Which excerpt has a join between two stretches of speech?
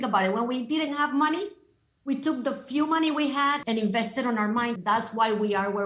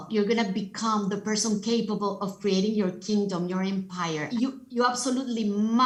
first; 2 cuts; at 3.6 s, 4.8 s

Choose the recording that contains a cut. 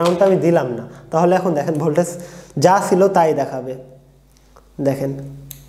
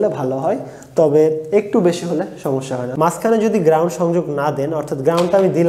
second; 1 cut; at 2.8 s

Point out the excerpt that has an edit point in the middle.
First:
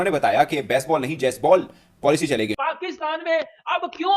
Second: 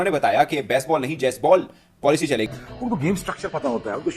second; 1 cut; at 2.5 s

